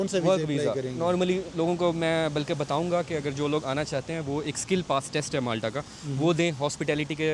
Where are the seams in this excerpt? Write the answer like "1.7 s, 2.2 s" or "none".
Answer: none